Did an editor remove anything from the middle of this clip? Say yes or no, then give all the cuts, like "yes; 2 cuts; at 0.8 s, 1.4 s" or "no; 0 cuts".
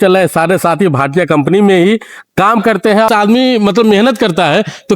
yes; 1 cut; at 3.1 s